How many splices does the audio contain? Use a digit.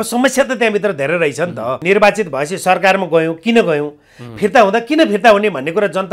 1